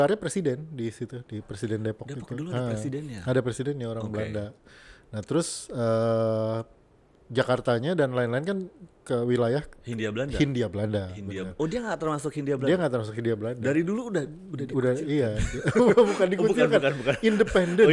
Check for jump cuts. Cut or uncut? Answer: uncut